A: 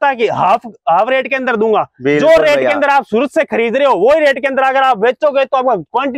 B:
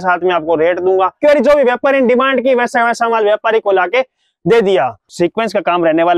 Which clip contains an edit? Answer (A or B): B